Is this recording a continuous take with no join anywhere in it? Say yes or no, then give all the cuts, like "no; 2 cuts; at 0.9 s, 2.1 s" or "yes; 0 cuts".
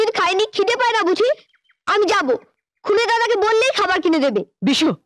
yes; 0 cuts